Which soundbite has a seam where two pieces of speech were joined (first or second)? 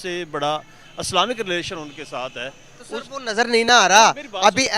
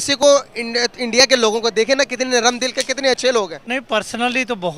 second